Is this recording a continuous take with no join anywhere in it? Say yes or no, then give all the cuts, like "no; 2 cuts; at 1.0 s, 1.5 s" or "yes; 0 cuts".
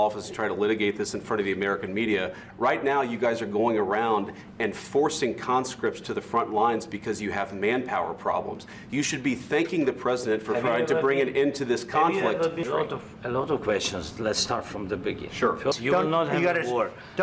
no; 2 cuts; at 12.6 s, 15.8 s